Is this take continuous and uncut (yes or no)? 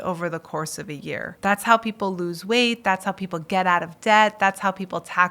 no